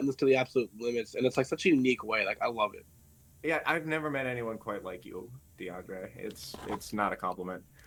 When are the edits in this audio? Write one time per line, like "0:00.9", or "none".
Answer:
none